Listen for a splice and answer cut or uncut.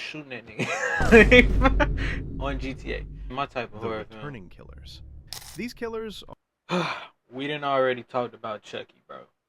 cut